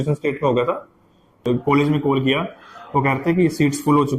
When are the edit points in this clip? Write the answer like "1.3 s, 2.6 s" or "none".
1.4 s